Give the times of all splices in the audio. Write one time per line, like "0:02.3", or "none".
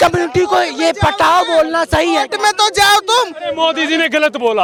none